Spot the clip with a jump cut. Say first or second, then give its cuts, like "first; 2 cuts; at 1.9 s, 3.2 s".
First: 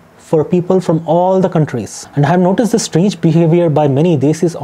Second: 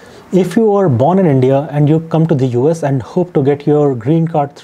first; 1 cut; at 1.9 s